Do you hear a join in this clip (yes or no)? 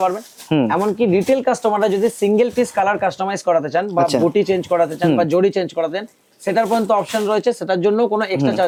no